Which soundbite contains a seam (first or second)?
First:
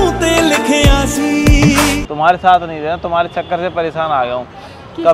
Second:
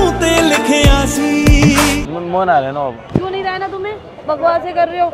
second